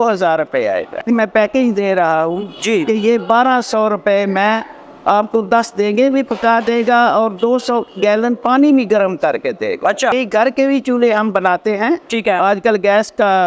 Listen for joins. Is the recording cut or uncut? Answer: cut